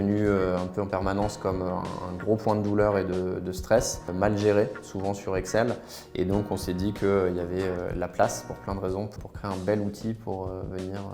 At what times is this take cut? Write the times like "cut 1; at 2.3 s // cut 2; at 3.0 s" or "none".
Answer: cut 1; at 4.1 s // cut 2; at 9.1 s